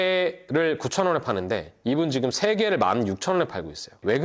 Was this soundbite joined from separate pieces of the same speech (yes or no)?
no